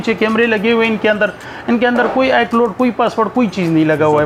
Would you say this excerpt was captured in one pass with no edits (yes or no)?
yes